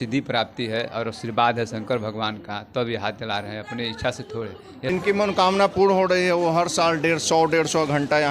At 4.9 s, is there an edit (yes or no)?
yes